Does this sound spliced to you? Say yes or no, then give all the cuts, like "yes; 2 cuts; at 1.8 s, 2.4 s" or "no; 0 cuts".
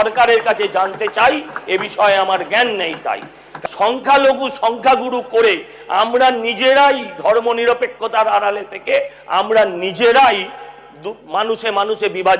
yes; 1 cut; at 3.5 s